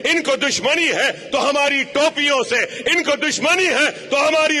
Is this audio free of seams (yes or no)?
yes